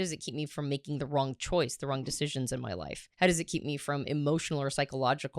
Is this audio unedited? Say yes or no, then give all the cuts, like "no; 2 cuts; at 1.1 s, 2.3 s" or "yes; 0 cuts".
no; 1 cut; at 3.0 s